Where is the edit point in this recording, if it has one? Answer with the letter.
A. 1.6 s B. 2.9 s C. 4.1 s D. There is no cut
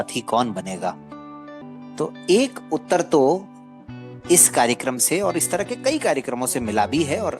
A